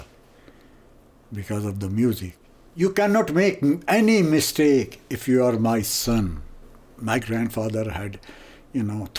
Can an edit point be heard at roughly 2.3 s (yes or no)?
yes